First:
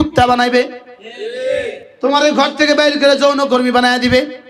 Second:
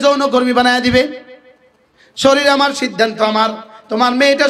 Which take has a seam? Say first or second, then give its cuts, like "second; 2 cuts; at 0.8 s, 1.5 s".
first; 1 cut; at 1.9 s